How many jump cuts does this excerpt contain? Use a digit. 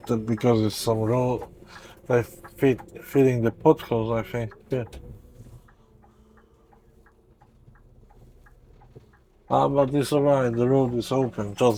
0